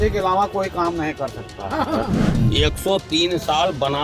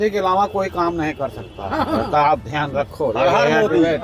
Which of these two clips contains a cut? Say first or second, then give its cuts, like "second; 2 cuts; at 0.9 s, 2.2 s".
first; 1 cut; at 2.1 s